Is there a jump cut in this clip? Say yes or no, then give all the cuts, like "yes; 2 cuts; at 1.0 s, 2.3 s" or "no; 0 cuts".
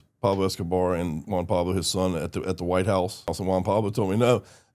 yes; 1 cut; at 3.4 s